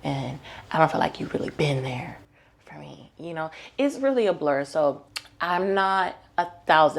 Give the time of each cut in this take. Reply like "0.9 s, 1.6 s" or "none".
none